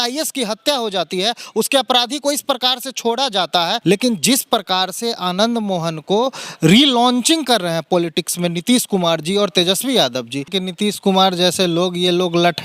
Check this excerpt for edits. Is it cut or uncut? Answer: cut